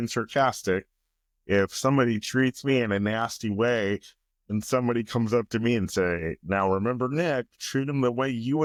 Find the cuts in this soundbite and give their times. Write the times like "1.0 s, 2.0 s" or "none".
none